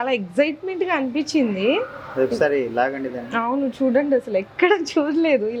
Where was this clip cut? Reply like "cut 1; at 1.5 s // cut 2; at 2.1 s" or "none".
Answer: none